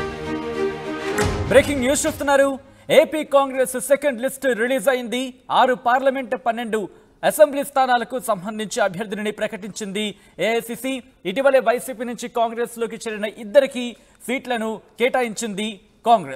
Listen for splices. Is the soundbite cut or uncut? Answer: cut